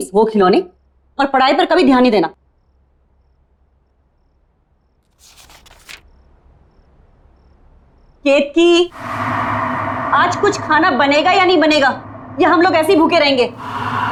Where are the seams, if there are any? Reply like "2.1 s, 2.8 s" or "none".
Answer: none